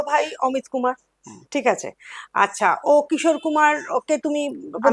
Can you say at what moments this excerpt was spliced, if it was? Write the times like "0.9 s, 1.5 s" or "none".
none